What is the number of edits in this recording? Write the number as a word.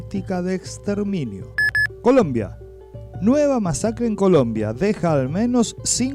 one